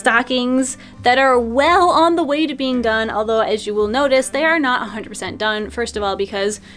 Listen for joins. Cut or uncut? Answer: uncut